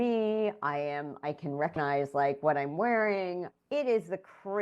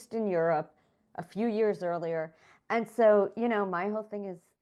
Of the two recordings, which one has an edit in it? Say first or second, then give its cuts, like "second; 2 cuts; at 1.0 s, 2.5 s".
first; 2 cuts; at 1.8 s, 3.5 s